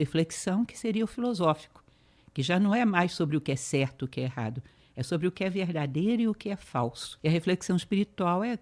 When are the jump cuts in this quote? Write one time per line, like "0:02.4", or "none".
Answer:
0:07.1